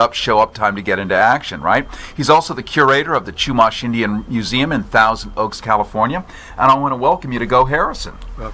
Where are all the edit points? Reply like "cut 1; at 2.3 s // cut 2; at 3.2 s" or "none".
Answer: none